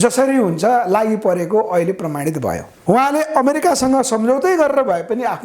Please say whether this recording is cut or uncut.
cut